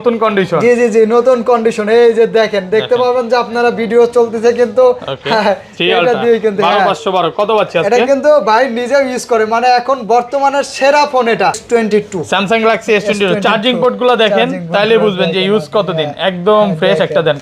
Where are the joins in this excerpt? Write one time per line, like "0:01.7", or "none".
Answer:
0:11.6